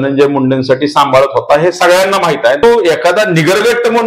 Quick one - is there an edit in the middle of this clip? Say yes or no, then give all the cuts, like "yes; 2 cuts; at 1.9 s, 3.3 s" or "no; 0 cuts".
yes; 1 cut; at 2.6 s